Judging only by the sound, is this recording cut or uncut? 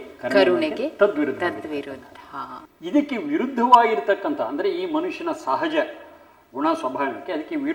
uncut